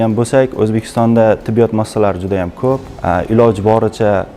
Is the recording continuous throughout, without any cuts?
no; 1 cut; at 2.9 s

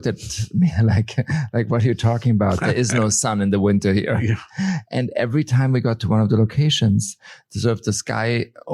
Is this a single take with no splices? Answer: yes; 0 cuts

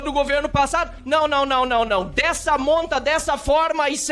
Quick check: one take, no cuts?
yes; 0 cuts

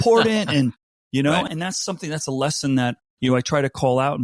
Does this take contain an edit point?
yes; 2 cuts; at 1.5 s, 3.1 s

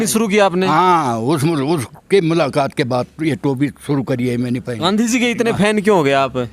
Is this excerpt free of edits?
no; 1 cut; at 4.7 s

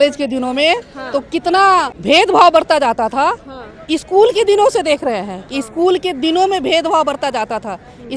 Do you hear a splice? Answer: yes; 1 cut; at 2.0 s

